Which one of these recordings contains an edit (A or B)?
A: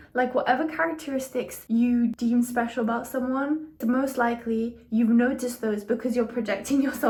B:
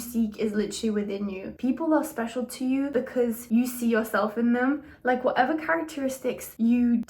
B